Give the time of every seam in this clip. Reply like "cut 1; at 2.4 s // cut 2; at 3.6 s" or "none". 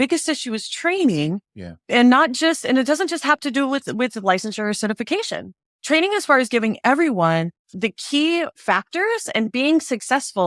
none